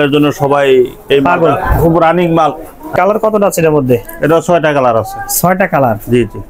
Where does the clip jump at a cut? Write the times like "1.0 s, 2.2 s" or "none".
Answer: 2.9 s